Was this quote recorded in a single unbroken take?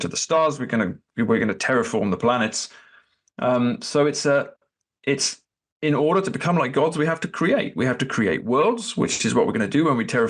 yes; 0 cuts

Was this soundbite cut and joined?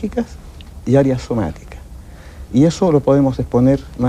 no; 0 cuts

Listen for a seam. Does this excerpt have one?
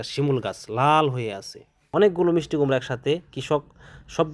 yes; 1 cut; at 1.8 s

